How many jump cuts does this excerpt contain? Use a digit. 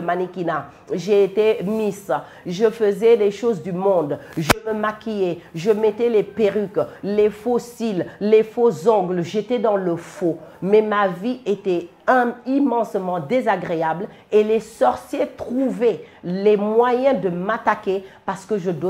0